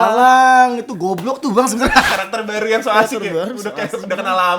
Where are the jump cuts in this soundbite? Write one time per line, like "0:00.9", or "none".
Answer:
0:02.1